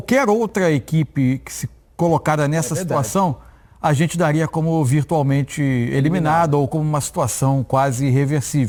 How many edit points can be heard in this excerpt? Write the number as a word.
zero